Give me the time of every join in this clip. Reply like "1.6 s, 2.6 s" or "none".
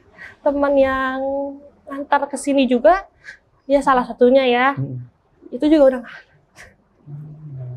none